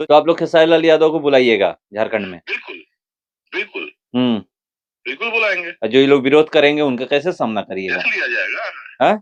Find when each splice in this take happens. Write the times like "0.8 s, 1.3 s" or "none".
none